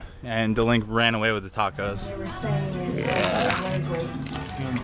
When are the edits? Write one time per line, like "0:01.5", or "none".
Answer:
none